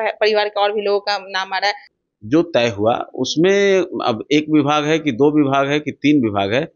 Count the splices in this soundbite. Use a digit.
1